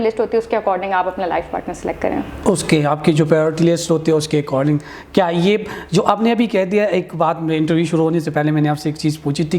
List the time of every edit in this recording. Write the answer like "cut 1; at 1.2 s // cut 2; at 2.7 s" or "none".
none